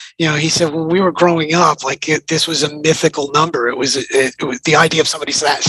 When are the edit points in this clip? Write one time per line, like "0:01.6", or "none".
none